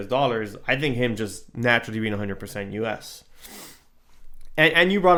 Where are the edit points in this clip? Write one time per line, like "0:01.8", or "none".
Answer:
none